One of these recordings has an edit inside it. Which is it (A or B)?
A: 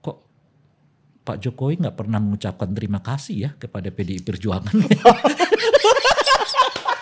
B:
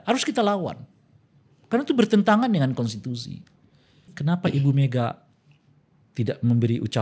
B